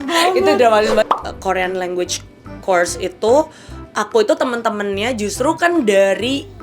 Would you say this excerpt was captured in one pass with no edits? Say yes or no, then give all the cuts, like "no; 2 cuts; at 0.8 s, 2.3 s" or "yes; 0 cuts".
no; 1 cut; at 1.1 s